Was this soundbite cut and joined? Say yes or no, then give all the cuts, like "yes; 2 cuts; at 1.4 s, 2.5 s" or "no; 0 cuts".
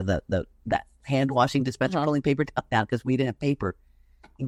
no; 0 cuts